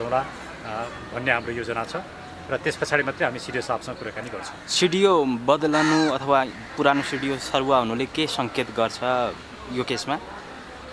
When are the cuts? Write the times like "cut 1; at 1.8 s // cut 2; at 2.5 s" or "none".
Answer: none